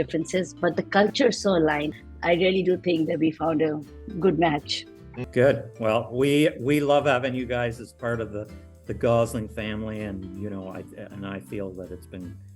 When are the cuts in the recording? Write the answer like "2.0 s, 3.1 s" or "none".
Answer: 1.9 s, 5.2 s